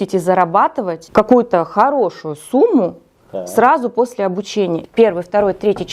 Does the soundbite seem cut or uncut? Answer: cut